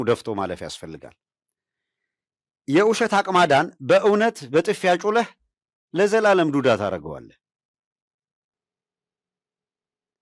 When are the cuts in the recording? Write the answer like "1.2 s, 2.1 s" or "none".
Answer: none

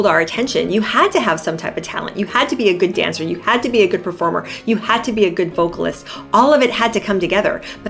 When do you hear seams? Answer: none

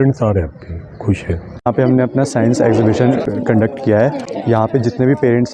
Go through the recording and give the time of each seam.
1.6 s, 3.2 s, 4.3 s

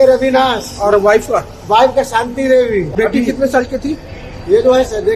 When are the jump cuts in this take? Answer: 2.9 s

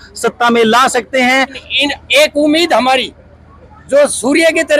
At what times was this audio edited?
1.6 s

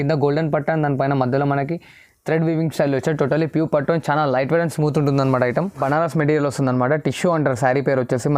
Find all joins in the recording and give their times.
5.8 s

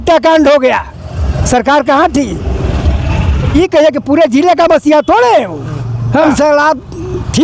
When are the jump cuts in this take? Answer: 3.5 s, 6.3 s

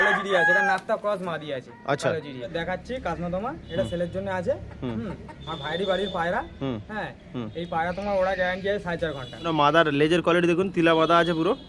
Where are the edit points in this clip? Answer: 2.5 s, 9.5 s

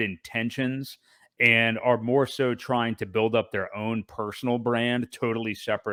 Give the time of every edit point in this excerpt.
none

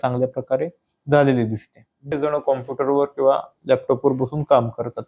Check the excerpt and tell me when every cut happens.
2.1 s

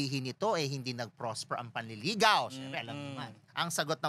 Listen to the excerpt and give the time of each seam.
none

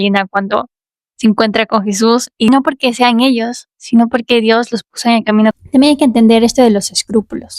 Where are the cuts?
2.5 s, 5.5 s

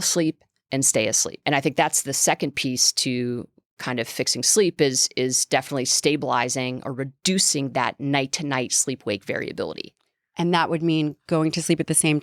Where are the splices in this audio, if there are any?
1.3 s

